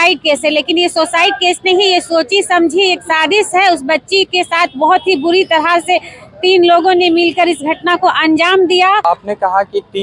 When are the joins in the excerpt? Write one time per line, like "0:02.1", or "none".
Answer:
0:09.0